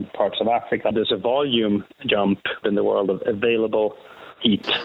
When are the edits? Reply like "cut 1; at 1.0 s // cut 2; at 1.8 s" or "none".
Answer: cut 1; at 0.9 s // cut 2; at 2.6 s